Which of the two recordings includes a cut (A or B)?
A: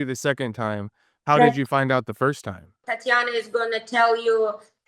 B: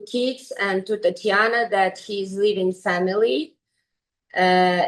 A